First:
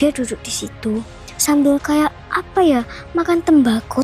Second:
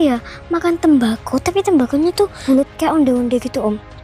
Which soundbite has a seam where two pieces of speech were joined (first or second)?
second